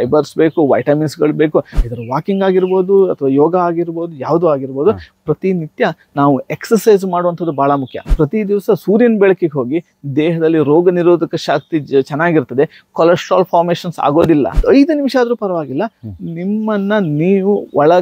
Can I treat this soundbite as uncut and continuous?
no; 3 cuts; at 1.7 s, 8.0 s, 14.6 s

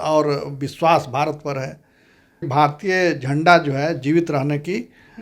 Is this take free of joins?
no; 1 cut; at 2.5 s

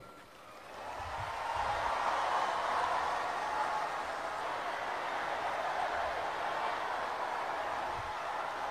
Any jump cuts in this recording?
yes; 1 cut; at 4.4 s

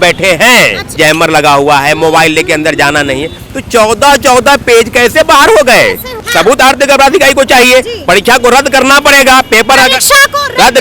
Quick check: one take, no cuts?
no; 2 cuts; at 0.9 s, 6.2 s

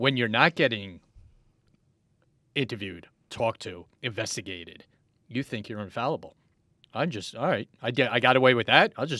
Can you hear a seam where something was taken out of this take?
no; 0 cuts

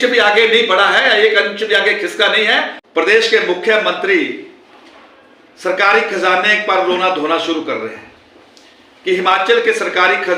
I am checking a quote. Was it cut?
yes; 1 cut; at 2.8 s

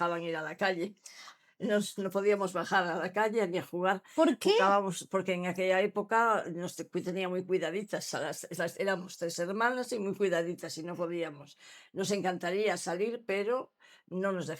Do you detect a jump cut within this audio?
no; 0 cuts

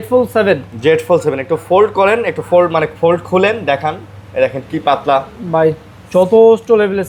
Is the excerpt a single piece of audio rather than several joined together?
yes; 0 cuts

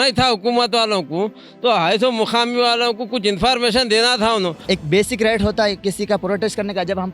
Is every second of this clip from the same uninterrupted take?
no; 1 cut; at 4.6 s

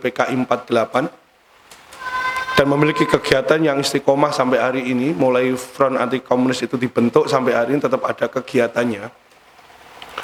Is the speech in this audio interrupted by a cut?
no; 0 cuts

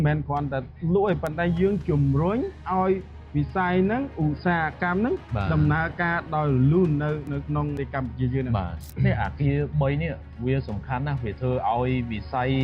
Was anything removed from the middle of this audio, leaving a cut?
yes; 2 cuts; at 7.8 s, 8.8 s

